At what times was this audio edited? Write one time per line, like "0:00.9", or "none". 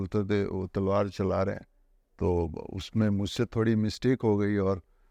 none